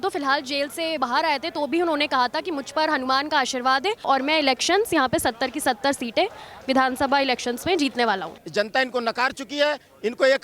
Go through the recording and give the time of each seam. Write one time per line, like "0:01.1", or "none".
0:01.0
0:04.0
0:08.4